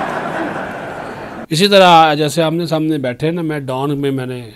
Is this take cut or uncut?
uncut